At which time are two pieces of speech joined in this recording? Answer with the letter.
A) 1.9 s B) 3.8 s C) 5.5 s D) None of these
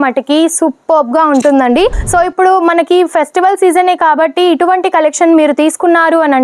A